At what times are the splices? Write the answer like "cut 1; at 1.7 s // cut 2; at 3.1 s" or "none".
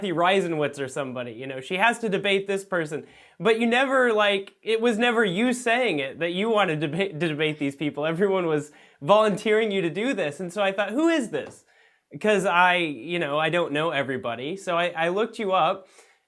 cut 1; at 9.6 s